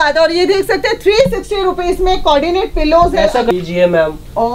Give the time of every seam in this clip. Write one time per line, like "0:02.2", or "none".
0:03.5